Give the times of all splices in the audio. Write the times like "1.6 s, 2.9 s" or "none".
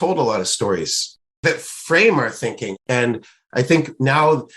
1.4 s